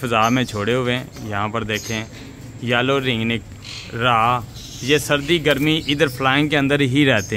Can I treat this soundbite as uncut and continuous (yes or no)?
yes